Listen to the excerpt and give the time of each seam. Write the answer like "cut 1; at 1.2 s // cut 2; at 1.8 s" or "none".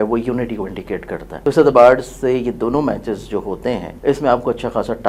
cut 1; at 1.3 s // cut 2; at 3.9 s